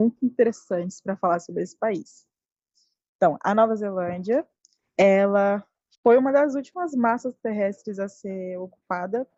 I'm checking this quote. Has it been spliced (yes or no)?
no